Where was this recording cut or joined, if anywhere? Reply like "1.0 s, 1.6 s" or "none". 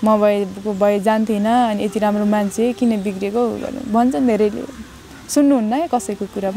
none